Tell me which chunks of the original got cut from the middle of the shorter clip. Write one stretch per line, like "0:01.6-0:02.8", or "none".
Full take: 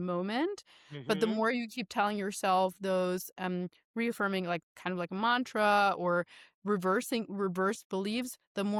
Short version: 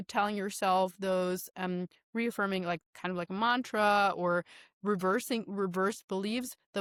none